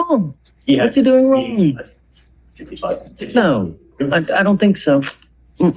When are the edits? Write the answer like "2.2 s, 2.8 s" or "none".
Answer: 3.1 s